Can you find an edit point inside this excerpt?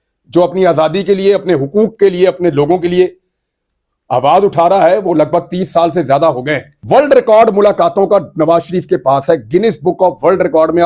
yes; 1 cut; at 6.7 s

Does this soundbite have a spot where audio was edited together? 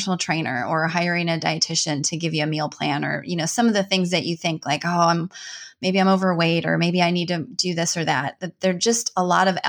no; 0 cuts

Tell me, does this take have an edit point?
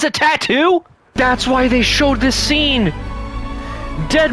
yes; 1 cut; at 1.0 s

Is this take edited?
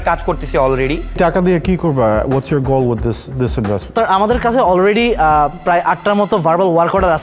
no; 0 cuts

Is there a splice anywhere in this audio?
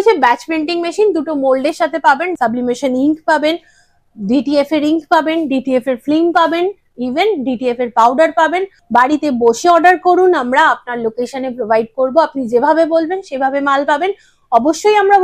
yes; 2 cuts; at 2.3 s, 8.7 s

